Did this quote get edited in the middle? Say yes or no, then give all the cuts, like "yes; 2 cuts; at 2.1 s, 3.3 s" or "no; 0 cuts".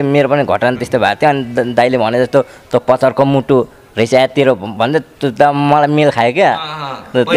no; 0 cuts